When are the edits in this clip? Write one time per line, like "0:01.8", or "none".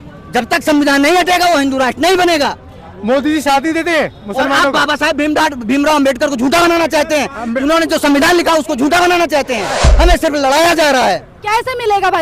0:09.8